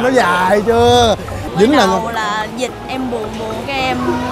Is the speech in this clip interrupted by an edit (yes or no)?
yes